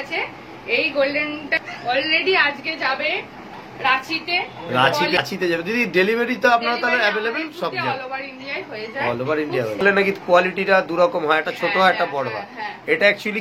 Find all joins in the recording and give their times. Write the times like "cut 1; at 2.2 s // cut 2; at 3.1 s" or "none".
cut 1; at 1.5 s // cut 2; at 5.2 s // cut 3; at 9.8 s